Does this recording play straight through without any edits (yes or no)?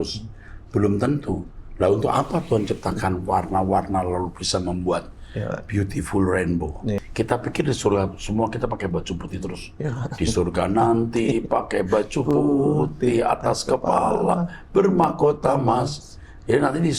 no